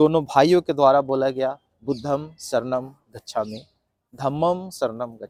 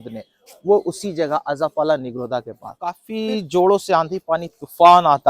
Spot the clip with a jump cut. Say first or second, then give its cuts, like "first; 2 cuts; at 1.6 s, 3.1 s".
second; 1 cut; at 3.1 s